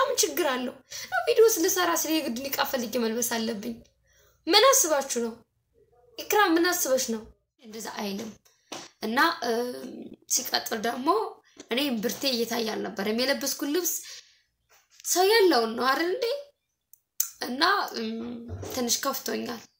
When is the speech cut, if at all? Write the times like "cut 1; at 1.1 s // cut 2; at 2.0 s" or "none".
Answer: cut 1; at 7.8 s